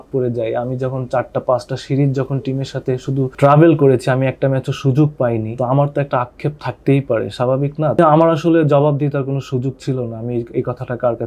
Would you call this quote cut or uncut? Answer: cut